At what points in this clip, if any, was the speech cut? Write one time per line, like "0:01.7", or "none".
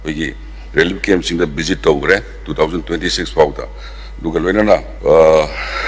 0:04.9